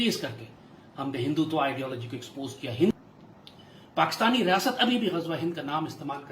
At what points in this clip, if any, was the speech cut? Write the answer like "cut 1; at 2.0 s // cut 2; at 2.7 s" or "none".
cut 1; at 2.9 s